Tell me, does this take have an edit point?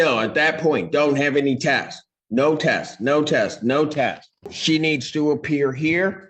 yes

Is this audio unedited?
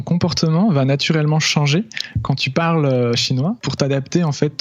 no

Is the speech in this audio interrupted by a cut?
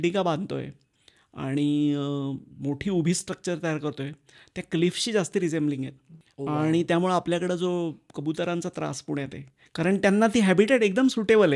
no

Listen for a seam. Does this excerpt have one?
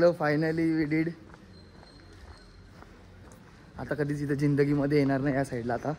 no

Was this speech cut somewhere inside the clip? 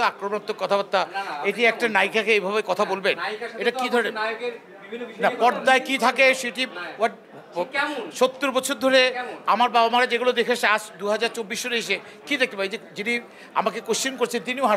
no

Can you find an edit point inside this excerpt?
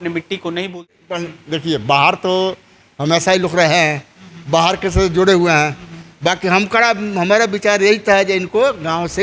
yes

